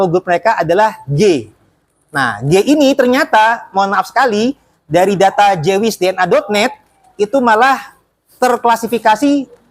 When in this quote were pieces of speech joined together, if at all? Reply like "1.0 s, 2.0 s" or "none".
none